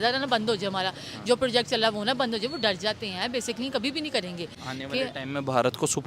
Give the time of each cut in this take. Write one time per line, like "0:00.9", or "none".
0:04.5